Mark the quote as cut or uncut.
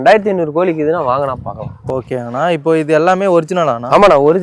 uncut